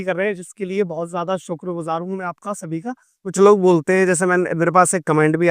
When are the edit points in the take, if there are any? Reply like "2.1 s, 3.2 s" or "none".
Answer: 3.3 s